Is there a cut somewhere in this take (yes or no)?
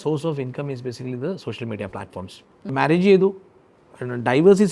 yes